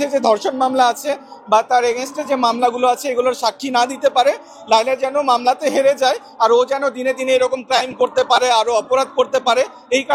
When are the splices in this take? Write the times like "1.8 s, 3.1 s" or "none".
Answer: none